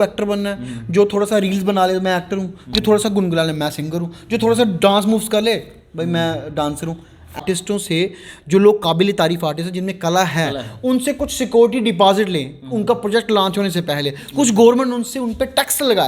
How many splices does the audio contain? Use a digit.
1